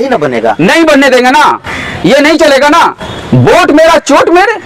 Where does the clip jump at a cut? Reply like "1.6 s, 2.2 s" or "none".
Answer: none